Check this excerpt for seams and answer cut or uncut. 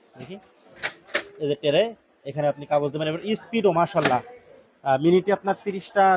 uncut